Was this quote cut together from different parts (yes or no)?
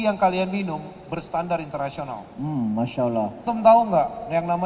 yes